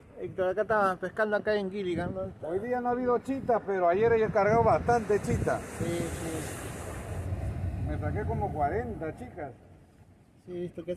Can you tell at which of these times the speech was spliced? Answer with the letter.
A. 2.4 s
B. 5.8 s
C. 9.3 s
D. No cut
D